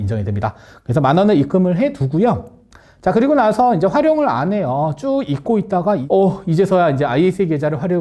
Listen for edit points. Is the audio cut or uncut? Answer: cut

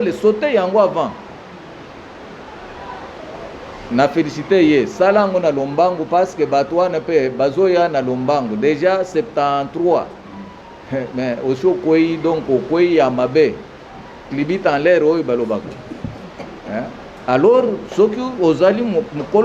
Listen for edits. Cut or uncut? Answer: uncut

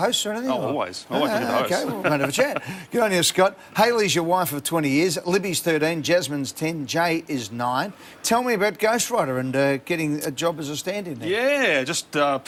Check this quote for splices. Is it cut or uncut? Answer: uncut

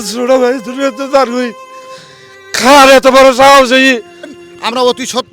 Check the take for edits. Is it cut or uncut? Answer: cut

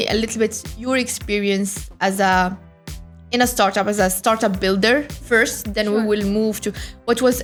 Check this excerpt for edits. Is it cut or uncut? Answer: uncut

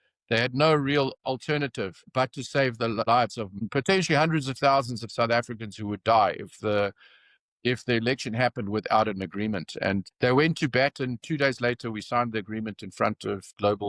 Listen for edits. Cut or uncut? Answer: uncut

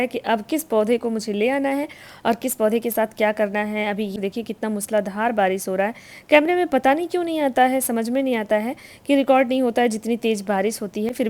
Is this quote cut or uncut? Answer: cut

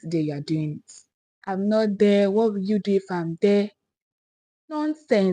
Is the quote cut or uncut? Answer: cut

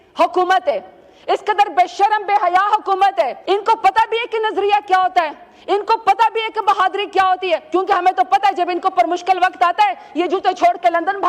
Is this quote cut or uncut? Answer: cut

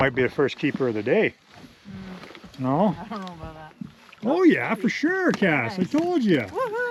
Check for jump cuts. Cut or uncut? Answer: uncut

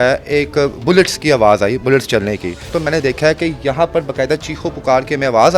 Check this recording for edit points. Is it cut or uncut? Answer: cut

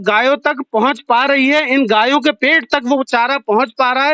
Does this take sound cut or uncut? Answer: uncut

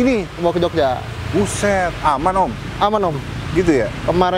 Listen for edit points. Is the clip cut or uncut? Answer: uncut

